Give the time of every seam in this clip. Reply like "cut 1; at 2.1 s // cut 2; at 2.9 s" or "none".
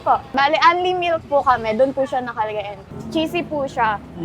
cut 1; at 2.9 s